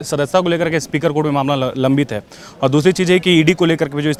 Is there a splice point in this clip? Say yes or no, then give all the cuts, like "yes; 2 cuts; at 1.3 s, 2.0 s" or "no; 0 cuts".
no; 0 cuts